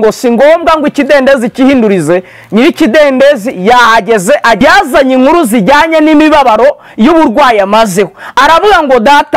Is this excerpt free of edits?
no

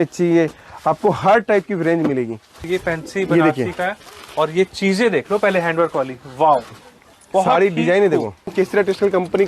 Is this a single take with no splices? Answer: no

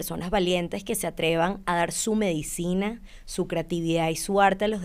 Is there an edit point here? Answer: no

